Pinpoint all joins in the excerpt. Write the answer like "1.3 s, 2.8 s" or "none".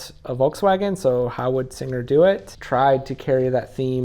2.5 s